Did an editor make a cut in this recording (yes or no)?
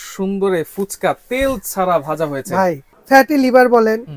yes